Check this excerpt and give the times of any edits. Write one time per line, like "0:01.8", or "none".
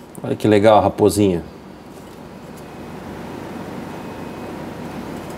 none